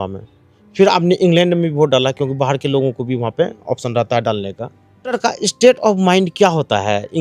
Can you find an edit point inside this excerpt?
yes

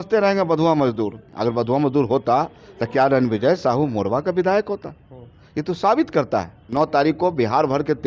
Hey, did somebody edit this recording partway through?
yes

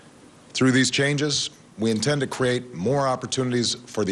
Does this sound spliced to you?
no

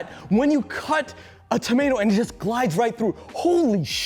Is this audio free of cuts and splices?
yes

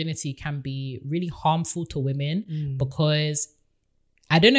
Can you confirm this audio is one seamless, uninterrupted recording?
yes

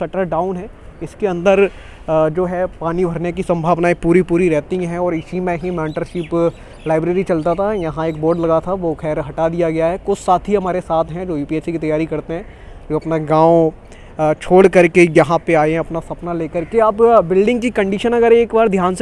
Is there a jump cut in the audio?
no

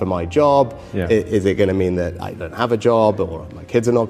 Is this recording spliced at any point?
no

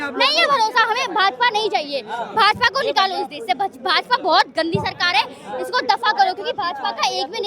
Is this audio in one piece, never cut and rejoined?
yes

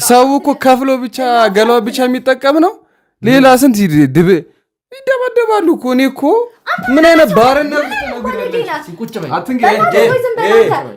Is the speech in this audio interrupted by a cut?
no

